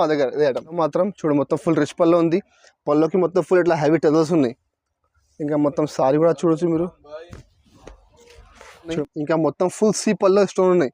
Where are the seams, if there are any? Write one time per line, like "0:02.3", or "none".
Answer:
0:00.8
0:09.0